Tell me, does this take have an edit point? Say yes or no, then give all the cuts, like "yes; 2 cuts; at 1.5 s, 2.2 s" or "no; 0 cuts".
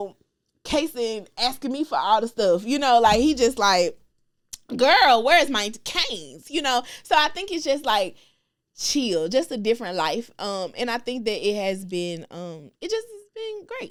no; 0 cuts